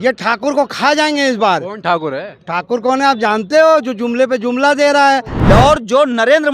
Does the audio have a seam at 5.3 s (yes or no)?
yes